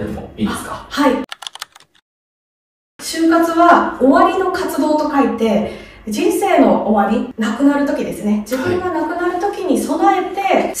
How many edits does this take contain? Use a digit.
0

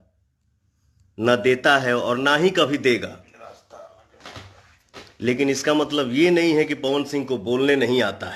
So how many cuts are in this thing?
0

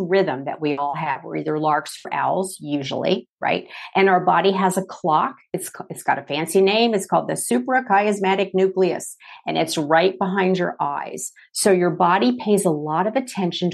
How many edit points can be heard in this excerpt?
0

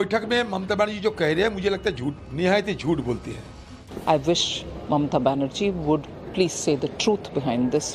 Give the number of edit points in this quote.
2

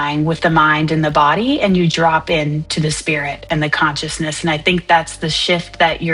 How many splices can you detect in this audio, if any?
0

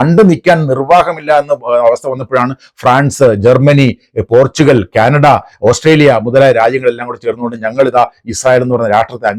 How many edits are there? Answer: 0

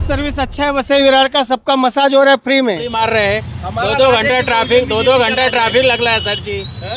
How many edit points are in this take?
1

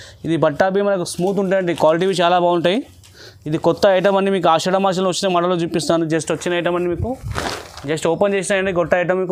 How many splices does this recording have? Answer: 0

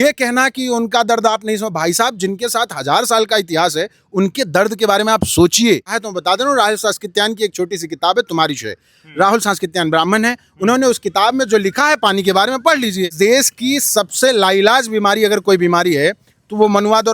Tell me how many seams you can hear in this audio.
2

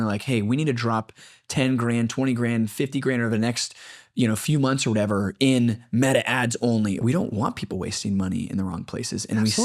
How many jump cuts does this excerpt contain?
1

